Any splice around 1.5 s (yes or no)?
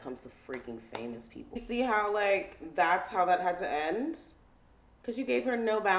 yes